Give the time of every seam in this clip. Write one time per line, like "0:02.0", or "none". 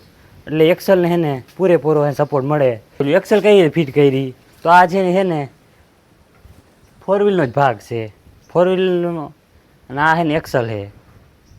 0:03.0